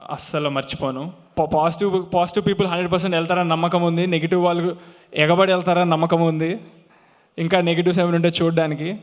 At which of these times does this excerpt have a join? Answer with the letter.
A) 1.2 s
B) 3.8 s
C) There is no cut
A